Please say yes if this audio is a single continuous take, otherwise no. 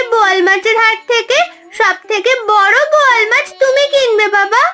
yes